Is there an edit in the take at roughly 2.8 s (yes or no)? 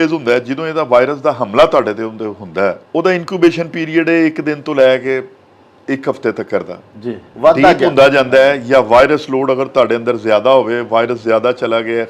yes